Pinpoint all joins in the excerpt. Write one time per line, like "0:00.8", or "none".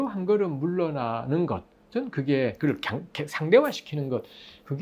none